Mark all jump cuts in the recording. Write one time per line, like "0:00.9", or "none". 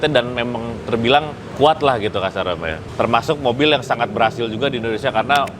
0:01.4
0:02.7